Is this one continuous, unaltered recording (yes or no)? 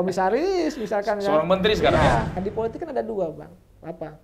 no